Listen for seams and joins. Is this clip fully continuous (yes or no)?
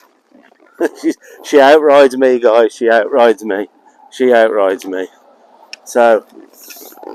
yes